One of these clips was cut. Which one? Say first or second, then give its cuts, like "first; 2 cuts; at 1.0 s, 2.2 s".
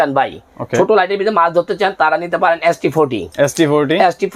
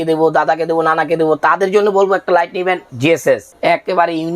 second; 1 cut; at 3.1 s